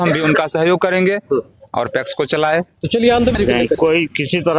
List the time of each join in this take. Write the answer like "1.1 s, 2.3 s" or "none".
3.3 s